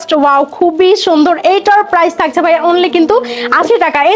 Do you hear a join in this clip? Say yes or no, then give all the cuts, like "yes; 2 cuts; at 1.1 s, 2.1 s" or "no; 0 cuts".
no; 0 cuts